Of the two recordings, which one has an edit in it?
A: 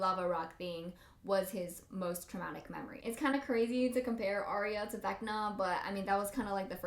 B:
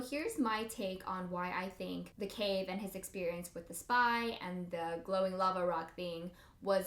A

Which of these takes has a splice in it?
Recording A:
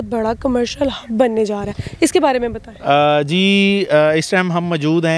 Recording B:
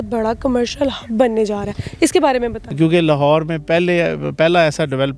B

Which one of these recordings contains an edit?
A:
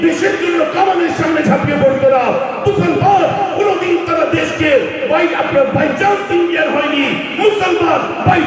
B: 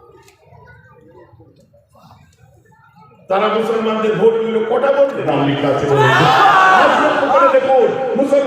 B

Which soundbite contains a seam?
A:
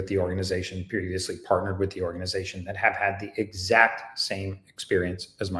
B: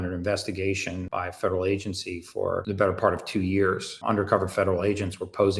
B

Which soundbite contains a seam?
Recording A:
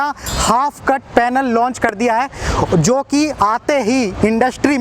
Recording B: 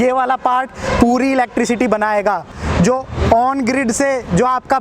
B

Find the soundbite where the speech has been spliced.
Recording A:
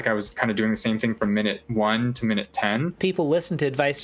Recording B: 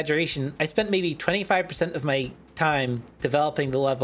A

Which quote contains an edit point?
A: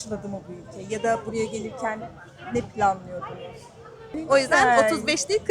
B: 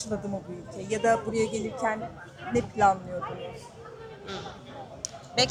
A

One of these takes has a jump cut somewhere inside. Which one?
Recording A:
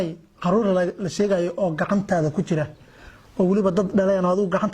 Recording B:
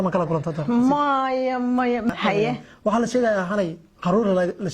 B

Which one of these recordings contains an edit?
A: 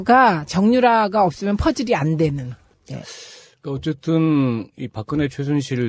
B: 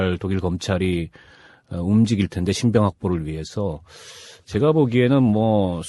A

